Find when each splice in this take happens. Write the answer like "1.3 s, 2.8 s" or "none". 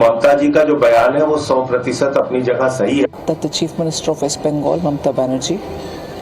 3.2 s